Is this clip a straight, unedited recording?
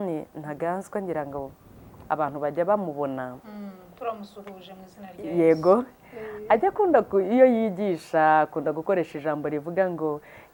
yes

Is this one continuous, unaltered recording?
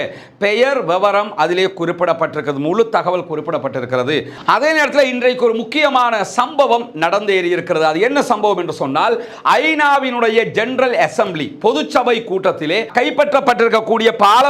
no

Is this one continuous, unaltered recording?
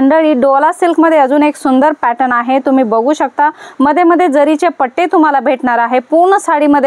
yes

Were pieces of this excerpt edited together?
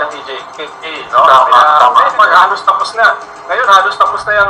no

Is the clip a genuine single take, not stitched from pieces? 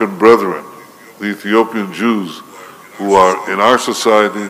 yes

